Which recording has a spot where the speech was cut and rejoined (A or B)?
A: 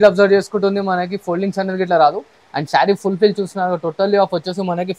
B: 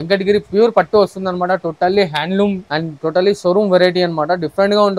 B